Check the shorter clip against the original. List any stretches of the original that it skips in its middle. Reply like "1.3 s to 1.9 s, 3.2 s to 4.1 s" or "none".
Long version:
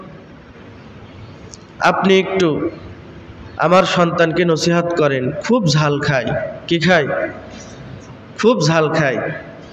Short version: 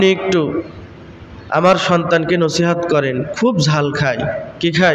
none